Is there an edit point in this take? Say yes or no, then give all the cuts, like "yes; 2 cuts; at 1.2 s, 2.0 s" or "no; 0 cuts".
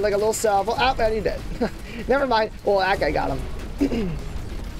no; 0 cuts